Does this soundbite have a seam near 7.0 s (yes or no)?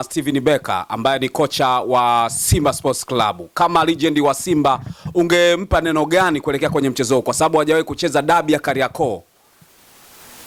no